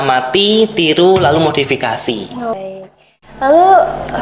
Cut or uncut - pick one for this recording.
cut